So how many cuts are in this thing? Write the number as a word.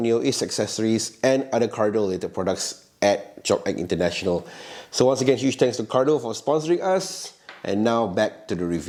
zero